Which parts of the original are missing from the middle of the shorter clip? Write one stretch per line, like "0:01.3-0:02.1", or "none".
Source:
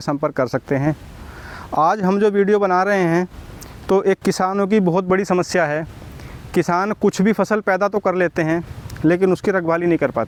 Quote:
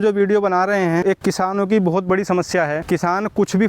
0:03.2-0:04.0
0:05.8-0:06.5